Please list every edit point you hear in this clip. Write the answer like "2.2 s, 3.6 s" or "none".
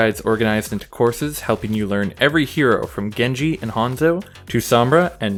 none